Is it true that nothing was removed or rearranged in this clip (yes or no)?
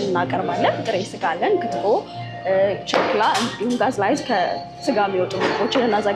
yes